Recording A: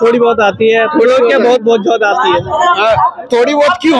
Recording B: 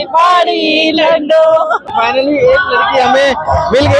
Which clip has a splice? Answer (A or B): B